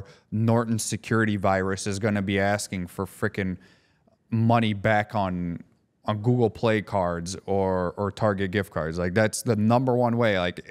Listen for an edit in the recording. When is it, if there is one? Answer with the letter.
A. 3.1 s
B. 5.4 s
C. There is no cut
C